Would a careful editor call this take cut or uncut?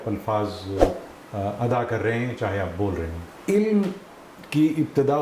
cut